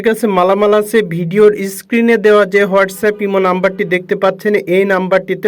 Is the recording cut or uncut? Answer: uncut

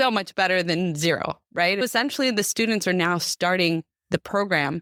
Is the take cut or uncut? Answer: uncut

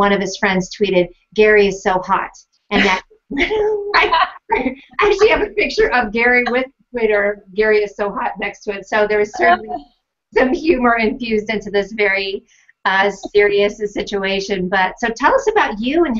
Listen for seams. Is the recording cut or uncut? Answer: uncut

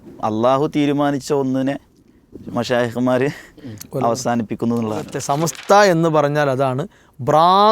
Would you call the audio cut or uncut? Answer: cut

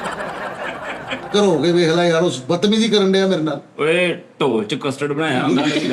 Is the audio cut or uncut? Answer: cut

